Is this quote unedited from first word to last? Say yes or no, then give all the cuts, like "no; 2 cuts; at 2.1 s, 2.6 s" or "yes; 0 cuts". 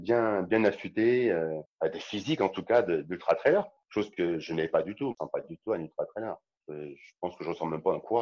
no; 4 cuts; at 1.6 s, 3.7 s, 5.1 s, 6.5 s